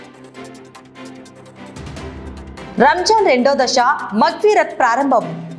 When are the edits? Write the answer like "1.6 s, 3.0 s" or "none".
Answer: none